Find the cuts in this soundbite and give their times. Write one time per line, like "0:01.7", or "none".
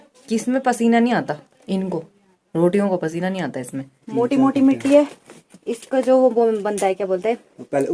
0:04.0